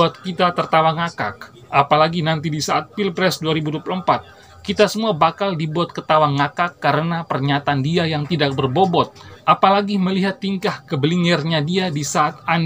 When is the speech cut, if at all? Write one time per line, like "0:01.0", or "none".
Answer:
0:09.2